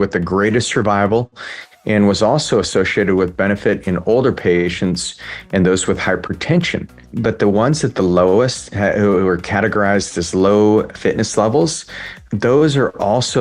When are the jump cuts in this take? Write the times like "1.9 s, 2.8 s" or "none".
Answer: 7.0 s, 10.9 s, 12.1 s